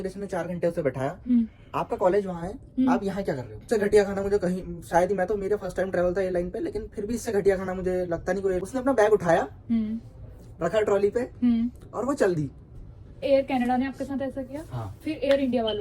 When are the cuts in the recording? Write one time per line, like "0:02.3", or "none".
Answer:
0:03.6
0:08.6
0:13.2